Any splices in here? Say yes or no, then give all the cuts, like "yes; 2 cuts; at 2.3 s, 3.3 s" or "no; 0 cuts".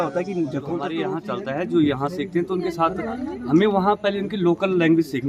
yes; 1 cut; at 1.1 s